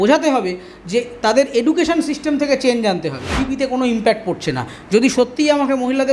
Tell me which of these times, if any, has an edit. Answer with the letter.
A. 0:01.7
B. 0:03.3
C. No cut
B